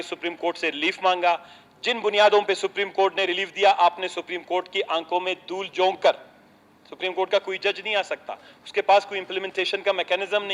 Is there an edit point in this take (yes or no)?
no